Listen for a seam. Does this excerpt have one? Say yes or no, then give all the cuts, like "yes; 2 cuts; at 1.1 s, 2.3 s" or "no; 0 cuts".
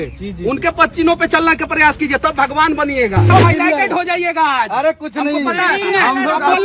yes; 1 cut; at 3.3 s